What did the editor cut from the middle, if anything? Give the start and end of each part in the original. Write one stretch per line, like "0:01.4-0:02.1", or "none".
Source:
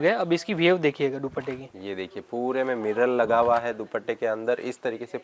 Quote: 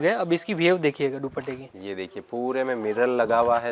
none

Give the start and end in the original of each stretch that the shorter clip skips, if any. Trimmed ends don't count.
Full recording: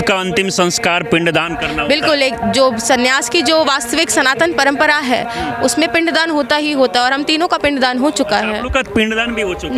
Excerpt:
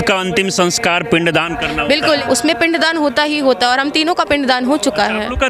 0:02.2-0:05.5

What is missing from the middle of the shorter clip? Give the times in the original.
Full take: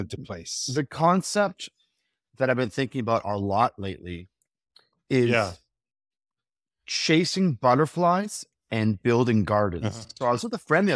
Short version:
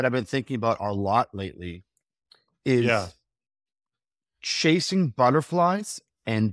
none

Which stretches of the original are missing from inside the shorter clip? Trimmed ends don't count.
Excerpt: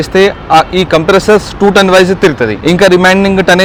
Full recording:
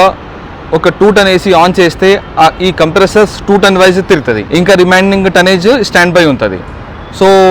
none

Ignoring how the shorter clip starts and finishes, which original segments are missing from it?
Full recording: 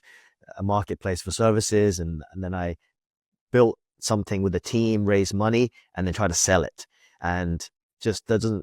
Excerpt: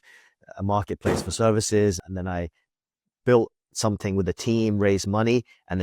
0:02.1-0:02.3

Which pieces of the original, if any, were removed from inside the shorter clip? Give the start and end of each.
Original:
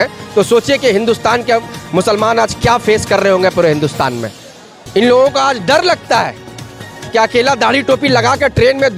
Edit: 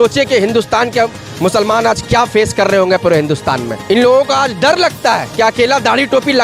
0:04.2-0:04.8
0:06.3-0:07.0

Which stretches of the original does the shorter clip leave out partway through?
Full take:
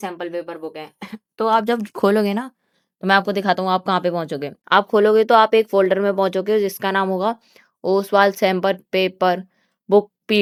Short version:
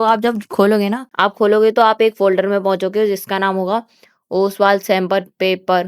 0:02.5-0:04.6

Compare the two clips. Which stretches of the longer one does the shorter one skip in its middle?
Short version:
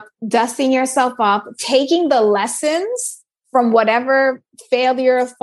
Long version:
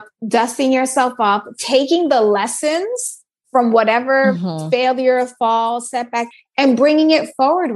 none

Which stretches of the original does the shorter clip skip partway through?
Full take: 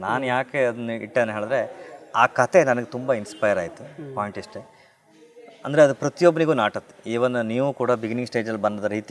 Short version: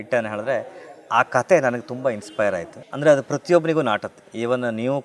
0:03.8-0:05.5

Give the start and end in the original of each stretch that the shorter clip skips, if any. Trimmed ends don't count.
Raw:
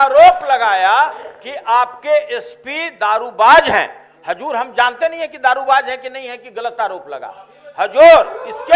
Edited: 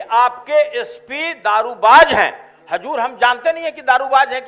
none

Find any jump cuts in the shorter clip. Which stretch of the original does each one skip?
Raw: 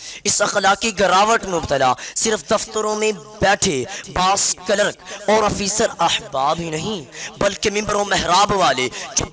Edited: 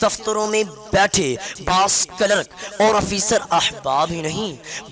none

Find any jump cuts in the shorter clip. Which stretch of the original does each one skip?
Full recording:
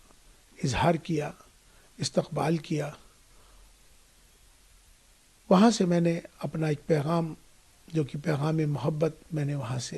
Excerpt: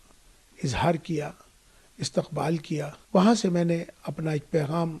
0:03.0-0:05.3

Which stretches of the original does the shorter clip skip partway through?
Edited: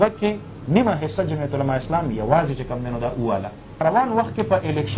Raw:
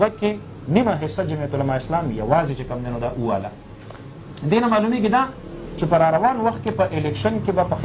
0:03.8-0:06.1

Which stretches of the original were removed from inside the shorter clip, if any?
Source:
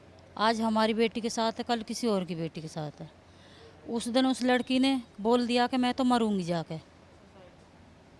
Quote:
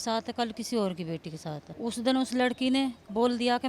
0:03.0-0:03.8

